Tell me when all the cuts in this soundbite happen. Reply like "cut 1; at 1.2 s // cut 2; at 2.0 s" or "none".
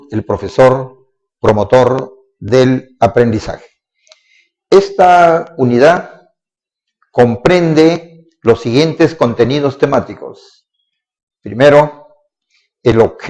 cut 1; at 4.5 s